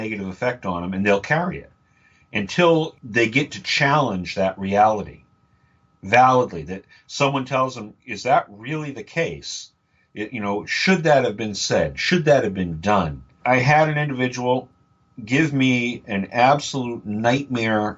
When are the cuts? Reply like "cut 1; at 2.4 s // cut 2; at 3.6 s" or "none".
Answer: cut 1; at 3.0 s // cut 2; at 13.4 s